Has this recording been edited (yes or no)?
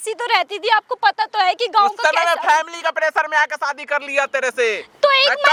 no